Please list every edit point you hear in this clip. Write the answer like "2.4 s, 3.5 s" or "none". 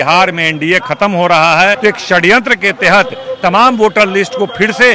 1.8 s